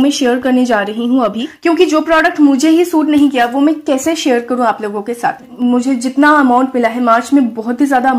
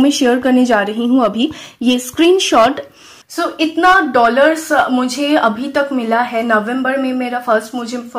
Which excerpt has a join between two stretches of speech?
first; 2 cuts; at 1.5 s, 5.4 s

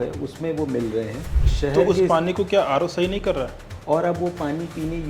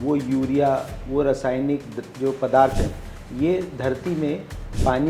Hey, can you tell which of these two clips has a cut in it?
first; 2 cuts; at 1.4 s, 3.7 s

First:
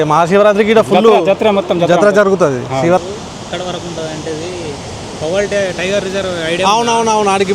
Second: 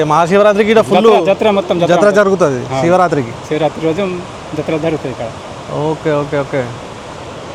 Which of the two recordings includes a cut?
first; 1 cut; at 3.0 s

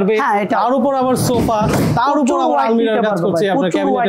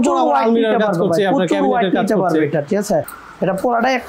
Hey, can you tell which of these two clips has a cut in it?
second; 1 cut; at 3.1 s

